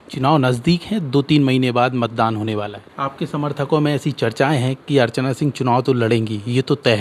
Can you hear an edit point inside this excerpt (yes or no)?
yes